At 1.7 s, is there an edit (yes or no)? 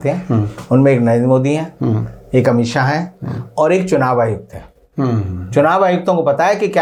no